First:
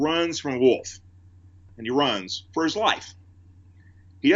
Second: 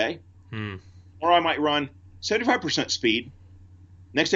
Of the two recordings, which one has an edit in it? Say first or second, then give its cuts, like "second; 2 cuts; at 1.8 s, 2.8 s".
first; 1 cut; at 1.7 s